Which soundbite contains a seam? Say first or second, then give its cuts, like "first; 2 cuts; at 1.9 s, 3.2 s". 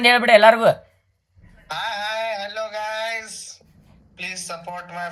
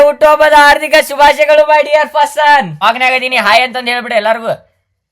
second; 1 cut; at 2.8 s